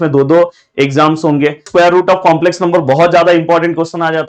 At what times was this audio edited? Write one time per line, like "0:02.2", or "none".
0:01.7